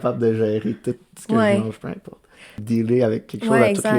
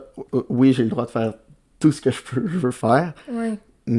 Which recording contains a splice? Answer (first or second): first